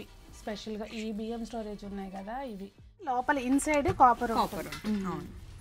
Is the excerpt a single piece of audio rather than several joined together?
no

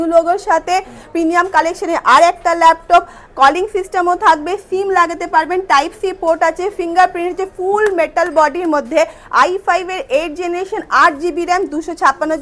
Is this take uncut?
yes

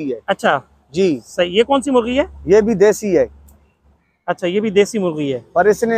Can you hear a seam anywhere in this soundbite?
no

